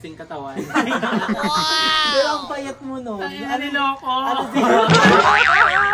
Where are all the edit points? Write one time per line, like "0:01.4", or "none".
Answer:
none